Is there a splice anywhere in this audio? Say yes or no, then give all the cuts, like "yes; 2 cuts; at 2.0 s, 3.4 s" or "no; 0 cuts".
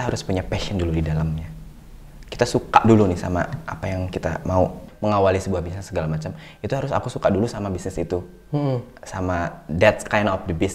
yes; 1 cut; at 4.9 s